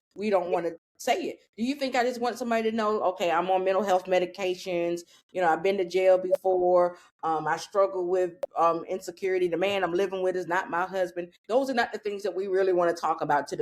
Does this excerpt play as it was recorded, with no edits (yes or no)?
no